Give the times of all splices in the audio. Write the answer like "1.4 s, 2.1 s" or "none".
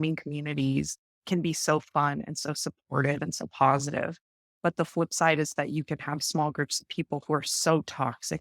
none